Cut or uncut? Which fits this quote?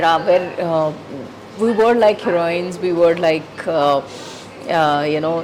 uncut